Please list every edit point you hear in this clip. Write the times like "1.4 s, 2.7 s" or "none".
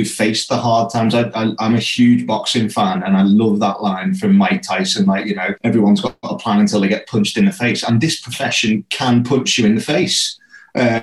5.5 s